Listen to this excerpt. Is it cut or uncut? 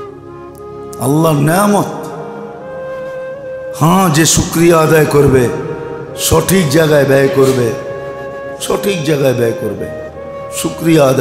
cut